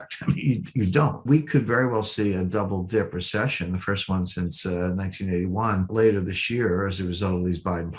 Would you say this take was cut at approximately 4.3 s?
no; 2 cuts; at 1.2 s, 5.9 s

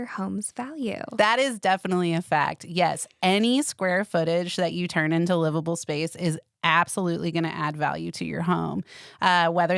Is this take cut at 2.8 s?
no; 1 cut; at 1.1 s

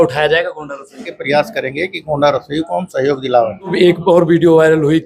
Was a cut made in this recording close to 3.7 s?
yes; 2 cuts; at 1.1 s, 3.7 s

